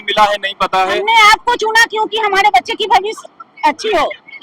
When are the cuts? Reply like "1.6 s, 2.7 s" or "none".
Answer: 0.9 s